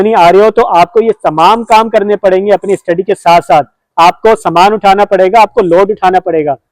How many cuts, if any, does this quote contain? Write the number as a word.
one